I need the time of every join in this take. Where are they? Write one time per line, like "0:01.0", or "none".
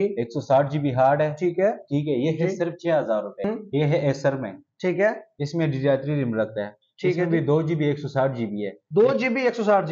0:03.5